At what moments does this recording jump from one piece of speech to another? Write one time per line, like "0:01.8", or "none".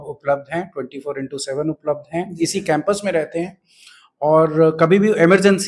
none